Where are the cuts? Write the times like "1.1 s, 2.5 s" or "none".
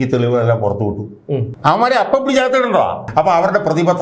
3.0 s